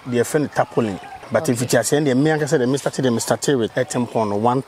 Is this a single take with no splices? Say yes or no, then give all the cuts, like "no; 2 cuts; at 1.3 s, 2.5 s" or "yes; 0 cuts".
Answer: no; 2 cuts; at 1.1 s, 3.7 s